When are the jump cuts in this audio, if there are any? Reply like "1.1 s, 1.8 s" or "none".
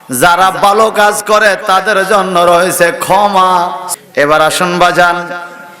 3.9 s

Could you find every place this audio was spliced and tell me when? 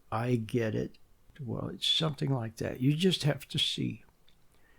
1.4 s

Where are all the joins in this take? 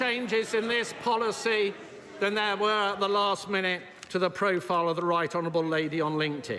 none

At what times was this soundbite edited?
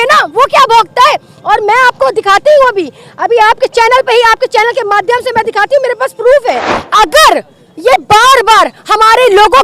6.8 s

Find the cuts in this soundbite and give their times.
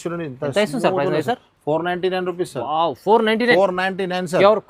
none

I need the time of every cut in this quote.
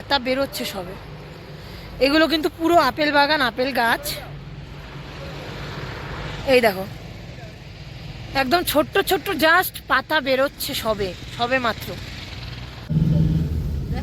12.9 s

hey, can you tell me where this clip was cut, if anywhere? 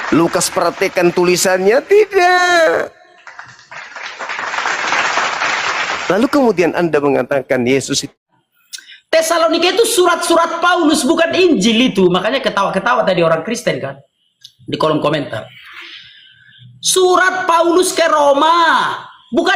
8.1 s

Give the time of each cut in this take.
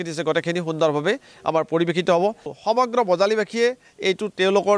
2.5 s

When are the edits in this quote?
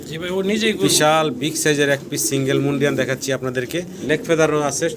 3.9 s

